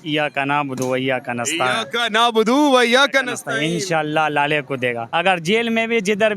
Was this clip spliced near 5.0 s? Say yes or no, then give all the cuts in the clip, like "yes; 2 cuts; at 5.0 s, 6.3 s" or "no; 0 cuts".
yes; 1 cut; at 5.0 s